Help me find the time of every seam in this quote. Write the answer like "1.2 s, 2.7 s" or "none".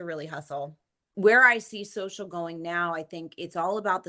1.1 s